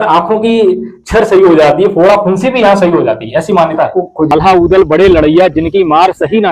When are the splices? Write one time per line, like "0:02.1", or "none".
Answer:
0:04.3

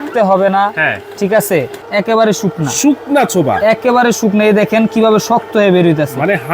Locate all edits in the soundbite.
0:01.8

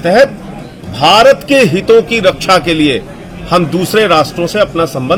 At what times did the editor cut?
none

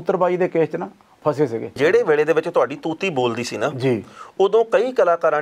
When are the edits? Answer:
0:01.7

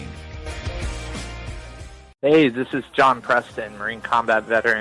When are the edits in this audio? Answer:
0:02.1

